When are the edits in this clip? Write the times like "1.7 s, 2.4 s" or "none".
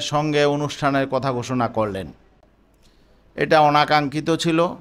none